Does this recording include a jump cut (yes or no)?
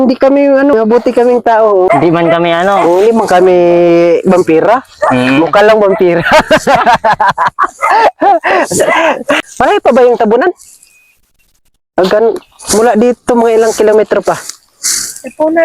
yes